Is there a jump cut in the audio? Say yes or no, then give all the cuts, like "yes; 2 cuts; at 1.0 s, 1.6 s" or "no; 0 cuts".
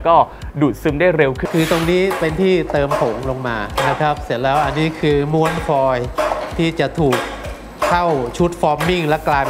yes; 1 cut; at 1.4 s